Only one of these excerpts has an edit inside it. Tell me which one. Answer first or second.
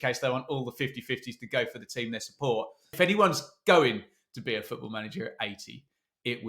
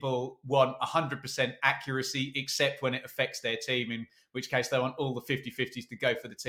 first